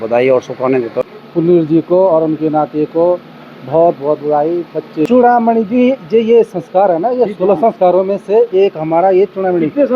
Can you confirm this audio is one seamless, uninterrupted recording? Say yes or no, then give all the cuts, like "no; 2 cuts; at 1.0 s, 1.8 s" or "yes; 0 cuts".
no; 2 cuts; at 1.0 s, 5.1 s